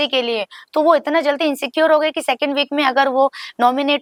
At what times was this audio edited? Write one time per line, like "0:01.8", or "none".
none

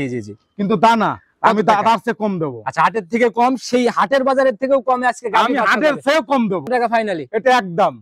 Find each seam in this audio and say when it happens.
0:06.7

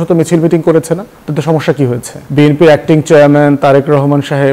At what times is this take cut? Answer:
0:02.1

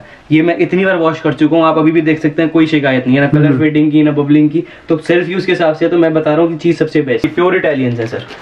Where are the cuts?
0:07.3

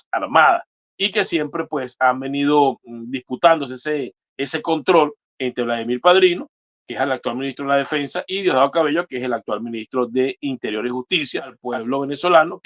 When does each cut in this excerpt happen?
0:11.6

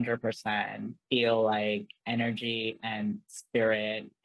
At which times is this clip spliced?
0:00.9
0:01.9

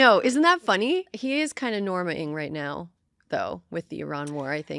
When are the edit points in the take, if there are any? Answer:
0:01.1

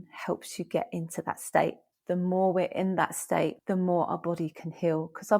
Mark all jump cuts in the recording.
0:01.9
0:03.6

